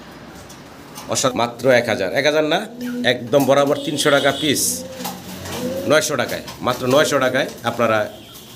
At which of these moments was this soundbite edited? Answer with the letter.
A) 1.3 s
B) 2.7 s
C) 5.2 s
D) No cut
A